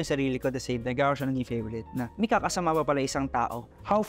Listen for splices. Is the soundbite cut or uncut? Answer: uncut